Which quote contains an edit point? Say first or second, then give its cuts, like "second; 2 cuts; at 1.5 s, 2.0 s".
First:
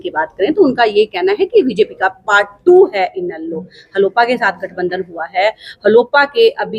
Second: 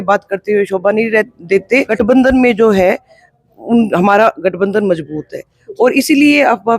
second; 1 cut; at 1.9 s